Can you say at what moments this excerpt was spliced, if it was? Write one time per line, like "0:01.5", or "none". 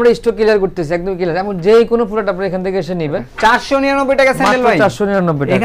0:03.3